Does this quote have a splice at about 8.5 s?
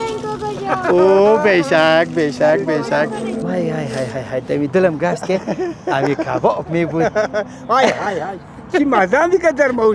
no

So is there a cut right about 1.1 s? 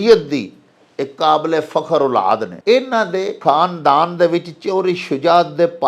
no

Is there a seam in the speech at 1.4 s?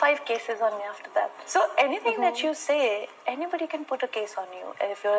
yes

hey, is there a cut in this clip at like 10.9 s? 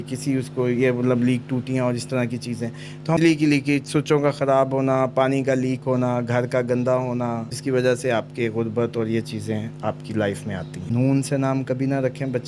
yes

